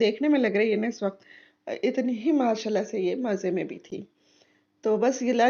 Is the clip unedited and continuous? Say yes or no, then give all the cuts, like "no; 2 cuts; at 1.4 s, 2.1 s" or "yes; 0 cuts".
yes; 0 cuts